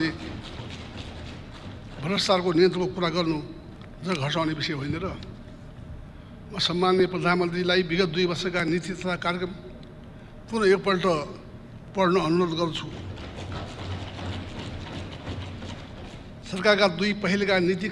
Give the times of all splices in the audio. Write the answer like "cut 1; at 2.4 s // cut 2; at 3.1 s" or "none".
cut 1; at 6.1 s // cut 2; at 16.4 s